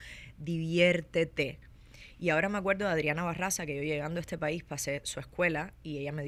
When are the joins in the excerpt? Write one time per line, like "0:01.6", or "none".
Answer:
none